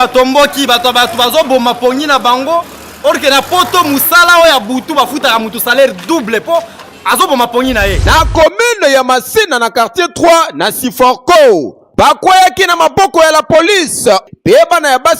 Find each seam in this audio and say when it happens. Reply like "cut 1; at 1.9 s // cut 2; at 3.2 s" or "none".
cut 1; at 8.0 s // cut 2; at 14.2 s